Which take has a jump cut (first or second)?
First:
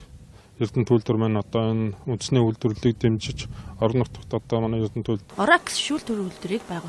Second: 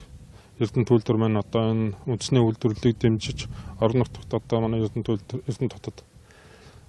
second